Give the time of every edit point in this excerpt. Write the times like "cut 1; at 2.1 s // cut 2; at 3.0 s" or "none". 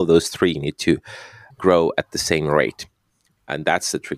cut 1; at 1.4 s